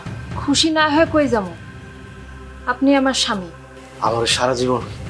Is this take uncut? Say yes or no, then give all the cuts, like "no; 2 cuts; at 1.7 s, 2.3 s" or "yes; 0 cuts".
yes; 0 cuts